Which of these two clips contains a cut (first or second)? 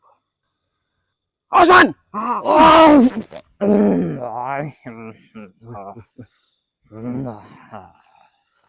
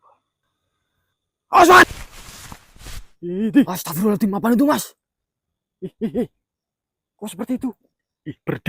second